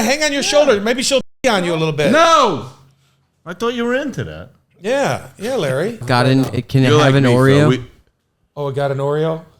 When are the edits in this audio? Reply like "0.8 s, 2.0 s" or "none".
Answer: 6.0 s

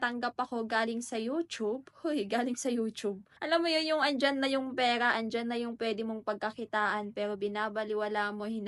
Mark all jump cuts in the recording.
3.3 s

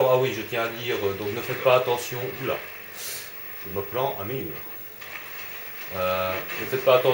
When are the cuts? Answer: 4.8 s

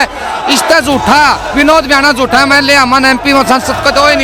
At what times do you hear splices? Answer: none

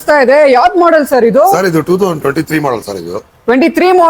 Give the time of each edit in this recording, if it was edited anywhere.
none

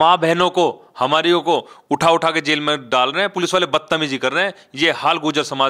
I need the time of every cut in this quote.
none

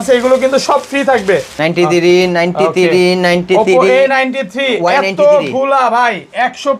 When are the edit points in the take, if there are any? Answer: 1.5 s

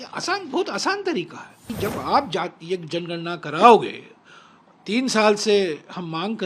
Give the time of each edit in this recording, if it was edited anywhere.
1.6 s

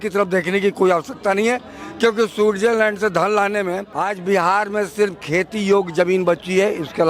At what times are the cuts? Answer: 3.9 s

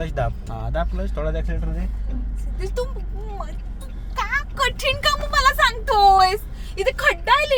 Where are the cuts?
none

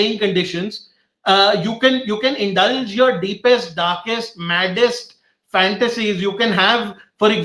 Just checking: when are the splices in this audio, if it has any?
none

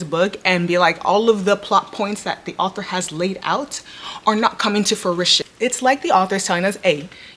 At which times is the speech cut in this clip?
5.4 s

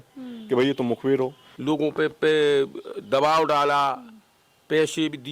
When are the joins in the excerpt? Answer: 1.5 s

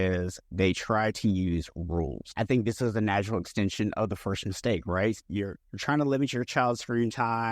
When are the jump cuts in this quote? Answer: 2.3 s, 5.2 s

